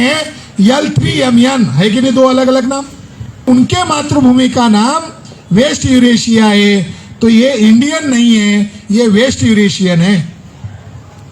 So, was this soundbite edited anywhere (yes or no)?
yes